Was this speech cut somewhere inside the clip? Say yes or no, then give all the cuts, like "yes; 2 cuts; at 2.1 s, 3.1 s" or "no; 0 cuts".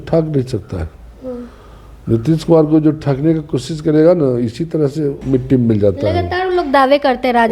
yes; 1 cut; at 5.2 s